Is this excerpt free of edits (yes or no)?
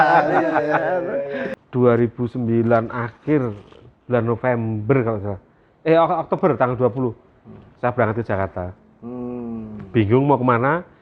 no